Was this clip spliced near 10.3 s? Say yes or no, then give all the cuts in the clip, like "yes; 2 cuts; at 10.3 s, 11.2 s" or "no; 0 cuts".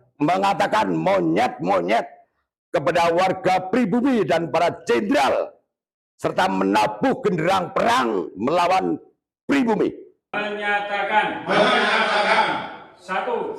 yes; 1 cut; at 10.3 s